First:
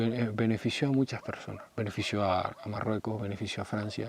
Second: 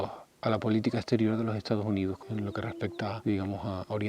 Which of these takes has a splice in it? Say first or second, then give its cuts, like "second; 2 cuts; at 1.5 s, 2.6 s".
second; 1 cut; at 2.7 s